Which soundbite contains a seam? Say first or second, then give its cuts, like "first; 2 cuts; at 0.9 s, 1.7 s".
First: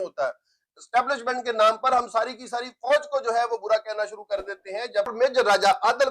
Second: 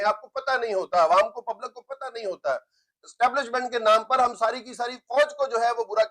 first; 1 cut; at 5.1 s